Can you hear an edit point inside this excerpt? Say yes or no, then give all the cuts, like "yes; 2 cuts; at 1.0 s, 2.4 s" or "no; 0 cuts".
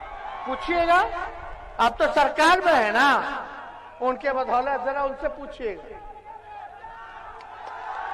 no; 0 cuts